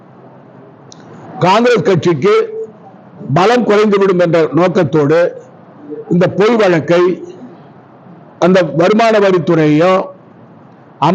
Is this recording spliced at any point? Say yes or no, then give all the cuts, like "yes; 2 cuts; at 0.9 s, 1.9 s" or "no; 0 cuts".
no; 0 cuts